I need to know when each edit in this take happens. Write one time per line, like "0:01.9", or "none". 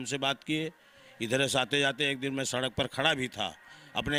none